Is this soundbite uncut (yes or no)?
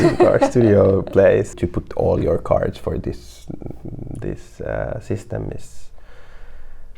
no